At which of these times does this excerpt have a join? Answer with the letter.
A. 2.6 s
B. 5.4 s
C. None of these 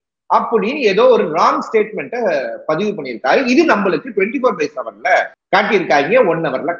B